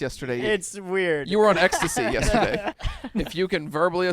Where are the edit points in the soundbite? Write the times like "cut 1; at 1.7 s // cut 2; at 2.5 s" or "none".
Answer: cut 1; at 2.7 s